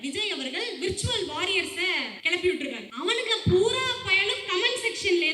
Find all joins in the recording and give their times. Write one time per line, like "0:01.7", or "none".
0:02.1
0:02.9